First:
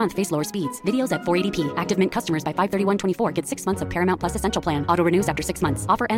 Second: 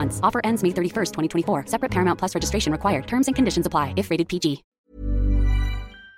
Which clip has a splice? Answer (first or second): second